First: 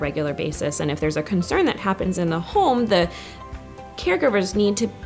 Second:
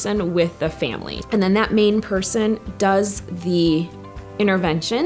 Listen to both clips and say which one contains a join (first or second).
second